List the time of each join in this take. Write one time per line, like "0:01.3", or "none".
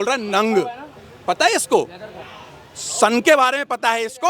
none